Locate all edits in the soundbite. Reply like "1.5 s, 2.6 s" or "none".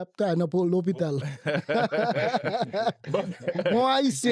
none